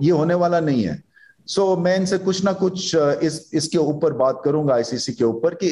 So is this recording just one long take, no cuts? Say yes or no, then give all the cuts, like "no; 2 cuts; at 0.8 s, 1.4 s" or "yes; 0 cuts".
yes; 0 cuts